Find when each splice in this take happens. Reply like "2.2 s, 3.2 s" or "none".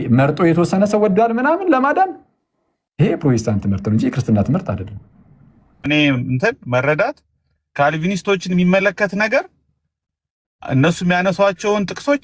5.8 s